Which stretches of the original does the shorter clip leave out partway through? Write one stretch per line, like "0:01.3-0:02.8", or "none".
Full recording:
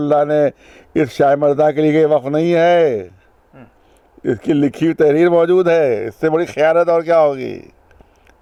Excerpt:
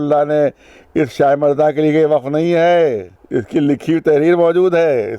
0:03.1-0:04.1